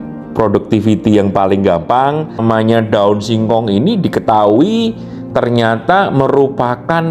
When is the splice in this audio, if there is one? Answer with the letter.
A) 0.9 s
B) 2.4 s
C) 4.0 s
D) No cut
B